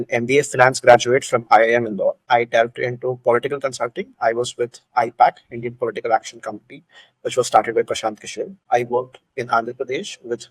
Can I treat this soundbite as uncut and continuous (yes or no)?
no